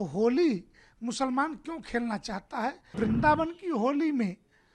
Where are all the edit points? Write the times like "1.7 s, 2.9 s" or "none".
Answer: 2.9 s